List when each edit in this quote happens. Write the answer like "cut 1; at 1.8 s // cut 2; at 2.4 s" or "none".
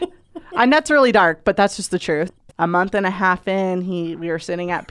cut 1; at 2.3 s